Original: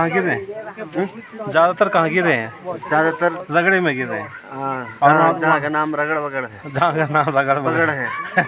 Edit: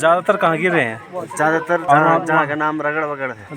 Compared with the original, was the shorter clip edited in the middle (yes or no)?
yes